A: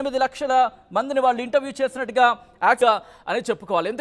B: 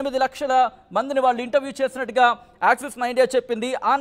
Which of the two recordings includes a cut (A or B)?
A